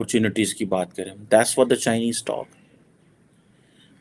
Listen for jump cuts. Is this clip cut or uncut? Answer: uncut